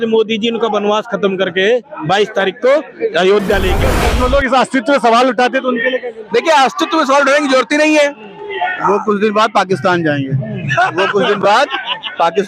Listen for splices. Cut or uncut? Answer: cut